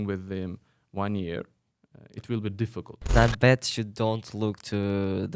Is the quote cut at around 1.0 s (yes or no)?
no